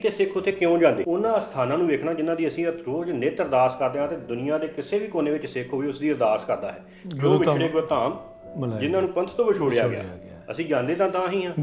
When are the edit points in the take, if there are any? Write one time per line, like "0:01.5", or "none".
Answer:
0:01.0